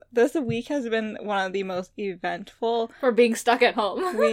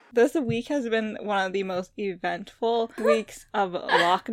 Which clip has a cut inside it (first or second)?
second